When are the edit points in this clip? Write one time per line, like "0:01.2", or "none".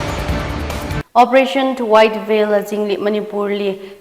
0:01.0

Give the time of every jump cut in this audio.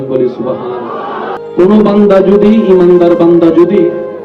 0:01.4

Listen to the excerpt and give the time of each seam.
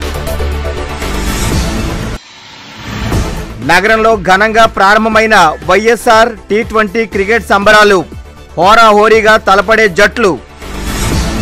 none

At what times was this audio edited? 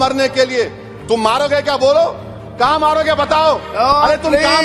none

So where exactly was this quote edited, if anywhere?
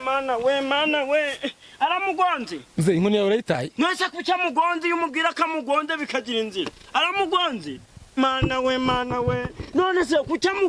none

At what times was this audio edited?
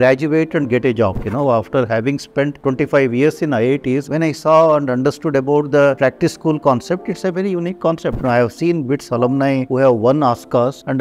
0:01.2
0:08.2

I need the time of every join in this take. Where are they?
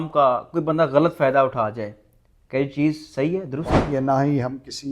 0:03.8

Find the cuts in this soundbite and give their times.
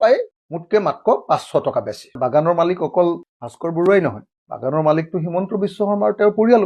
0:02.2

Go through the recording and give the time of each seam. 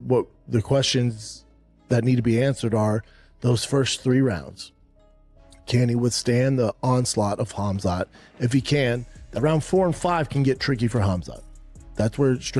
none

